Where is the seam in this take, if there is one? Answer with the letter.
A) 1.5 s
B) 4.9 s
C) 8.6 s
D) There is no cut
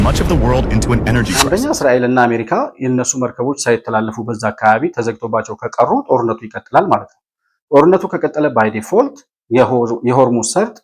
A